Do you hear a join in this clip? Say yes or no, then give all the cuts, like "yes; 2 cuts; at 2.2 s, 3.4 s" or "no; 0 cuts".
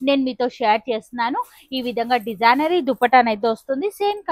no; 0 cuts